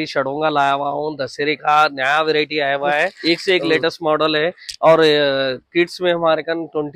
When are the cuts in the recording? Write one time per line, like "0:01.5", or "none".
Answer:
0:03.2